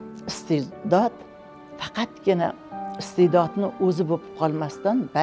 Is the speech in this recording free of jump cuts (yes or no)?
yes